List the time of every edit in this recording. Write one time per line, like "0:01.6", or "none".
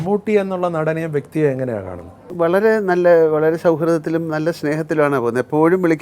0:02.3